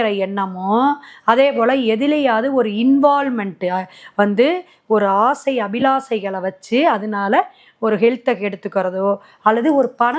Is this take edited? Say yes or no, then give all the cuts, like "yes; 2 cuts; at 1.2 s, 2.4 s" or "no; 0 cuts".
no; 0 cuts